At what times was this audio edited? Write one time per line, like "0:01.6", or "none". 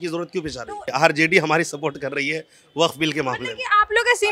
0:00.9